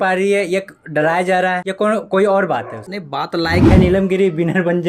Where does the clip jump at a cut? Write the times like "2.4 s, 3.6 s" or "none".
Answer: 3.7 s